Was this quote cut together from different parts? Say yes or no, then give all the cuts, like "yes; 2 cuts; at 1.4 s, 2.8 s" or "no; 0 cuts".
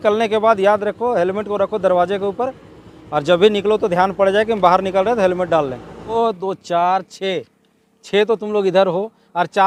no; 0 cuts